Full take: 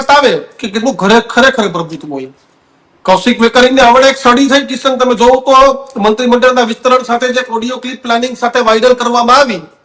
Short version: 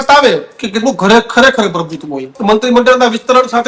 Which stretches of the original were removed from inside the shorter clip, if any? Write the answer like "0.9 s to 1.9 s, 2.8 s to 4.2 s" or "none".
2.3 s to 5.9 s